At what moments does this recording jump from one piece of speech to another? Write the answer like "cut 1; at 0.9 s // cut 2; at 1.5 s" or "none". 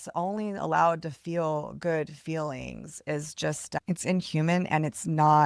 cut 1; at 3.8 s